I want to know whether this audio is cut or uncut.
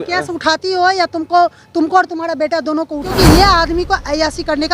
cut